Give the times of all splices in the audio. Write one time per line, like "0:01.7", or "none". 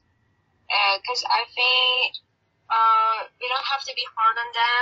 none